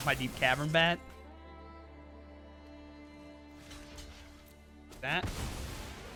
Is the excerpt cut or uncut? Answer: uncut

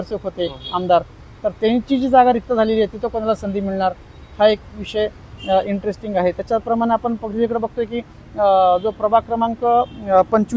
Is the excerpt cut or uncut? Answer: uncut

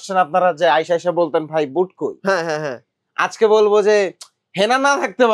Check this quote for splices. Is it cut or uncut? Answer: uncut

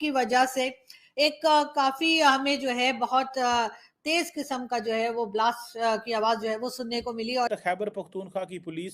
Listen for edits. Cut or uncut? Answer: cut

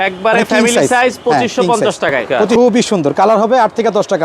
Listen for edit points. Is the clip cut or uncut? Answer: cut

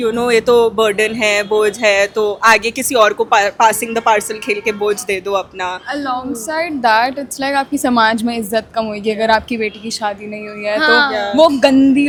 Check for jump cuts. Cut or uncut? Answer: uncut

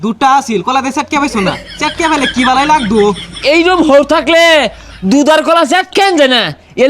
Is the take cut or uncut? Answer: uncut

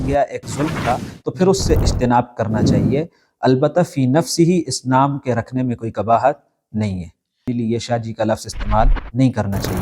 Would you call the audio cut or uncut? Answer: cut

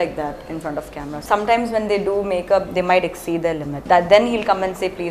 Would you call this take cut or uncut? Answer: cut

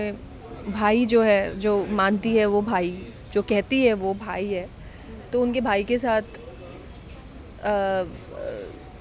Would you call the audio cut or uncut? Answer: uncut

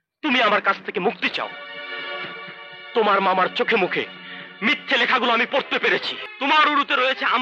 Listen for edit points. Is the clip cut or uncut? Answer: cut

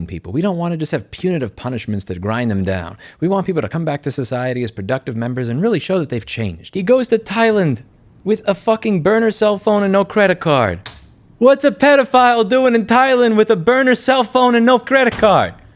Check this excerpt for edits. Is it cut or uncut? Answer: cut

